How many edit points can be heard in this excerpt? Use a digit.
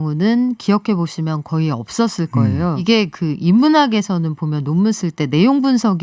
1